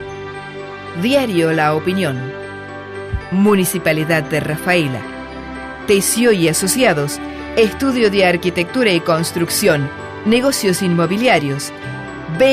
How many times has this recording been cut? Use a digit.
1